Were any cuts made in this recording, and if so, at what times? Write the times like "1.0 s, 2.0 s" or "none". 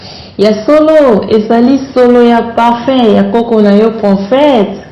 none